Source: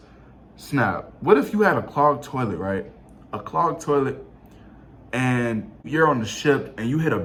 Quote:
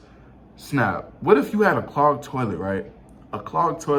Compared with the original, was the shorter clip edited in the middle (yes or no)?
no